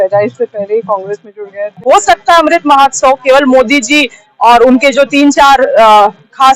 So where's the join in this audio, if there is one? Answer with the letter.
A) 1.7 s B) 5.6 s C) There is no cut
A